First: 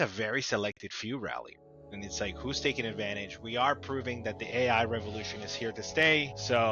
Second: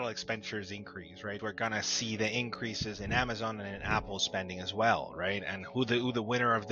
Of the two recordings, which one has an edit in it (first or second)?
second